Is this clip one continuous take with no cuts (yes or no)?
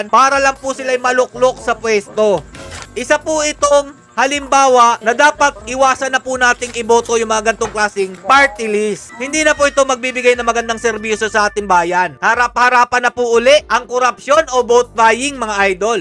yes